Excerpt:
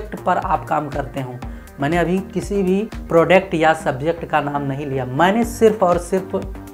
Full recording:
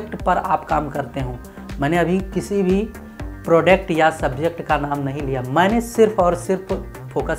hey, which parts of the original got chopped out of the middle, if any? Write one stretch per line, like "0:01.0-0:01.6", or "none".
0:03.0-0:03.3